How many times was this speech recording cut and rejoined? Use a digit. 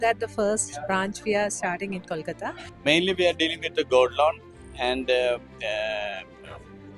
1